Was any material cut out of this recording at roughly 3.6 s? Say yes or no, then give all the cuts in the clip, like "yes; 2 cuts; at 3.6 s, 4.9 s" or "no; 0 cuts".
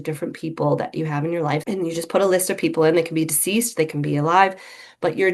no; 1 cut; at 1.6 s